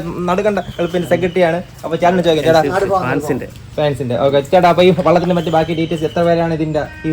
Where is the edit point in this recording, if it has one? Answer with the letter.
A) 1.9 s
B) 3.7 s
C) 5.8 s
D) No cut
D